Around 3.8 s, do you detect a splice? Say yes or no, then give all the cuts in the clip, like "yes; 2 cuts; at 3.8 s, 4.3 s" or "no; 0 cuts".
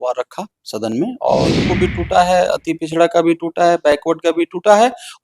no; 1 cut; at 1.6 s